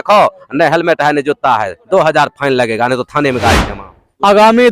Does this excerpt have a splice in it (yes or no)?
yes